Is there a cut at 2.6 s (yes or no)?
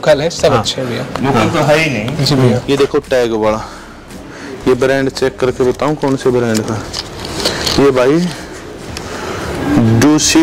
yes